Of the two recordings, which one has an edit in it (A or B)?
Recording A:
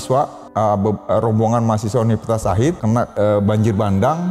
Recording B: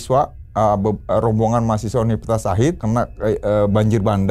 A